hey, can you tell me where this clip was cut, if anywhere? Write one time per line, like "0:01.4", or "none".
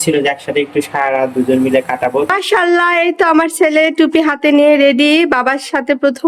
0:02.3